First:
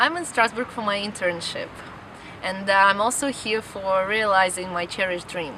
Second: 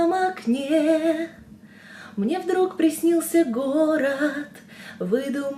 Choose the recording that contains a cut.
first; 1 cut; at 3.4 s

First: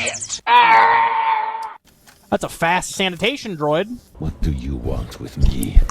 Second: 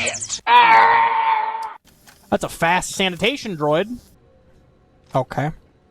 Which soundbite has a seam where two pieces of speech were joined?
first; 1 cut; at 4.1 s

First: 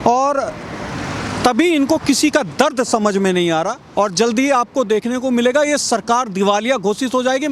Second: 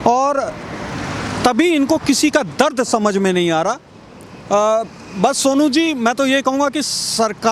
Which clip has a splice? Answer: first; 1 cut; at 3.8 s

